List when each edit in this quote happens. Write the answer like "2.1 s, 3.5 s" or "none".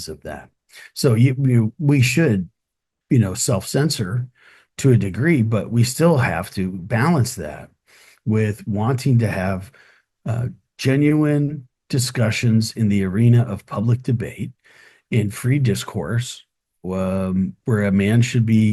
none